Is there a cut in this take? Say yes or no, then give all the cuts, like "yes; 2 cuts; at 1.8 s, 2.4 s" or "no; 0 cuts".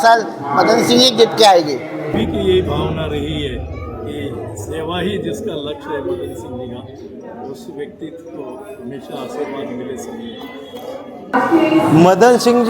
yes; 2 cuts; at 2.1 s, 11.2 s